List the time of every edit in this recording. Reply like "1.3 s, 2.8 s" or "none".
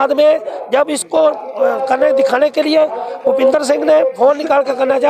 none